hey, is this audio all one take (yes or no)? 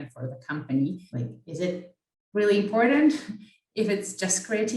no